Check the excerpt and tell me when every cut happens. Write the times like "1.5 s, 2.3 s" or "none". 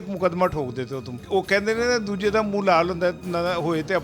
1.1 s